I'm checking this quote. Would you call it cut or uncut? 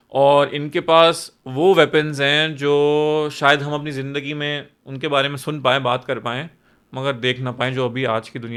uncut